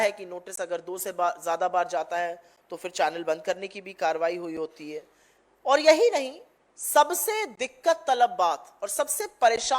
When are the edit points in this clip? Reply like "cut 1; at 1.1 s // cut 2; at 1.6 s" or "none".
none